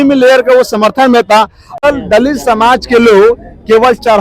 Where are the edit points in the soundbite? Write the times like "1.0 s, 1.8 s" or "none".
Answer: 1.8 s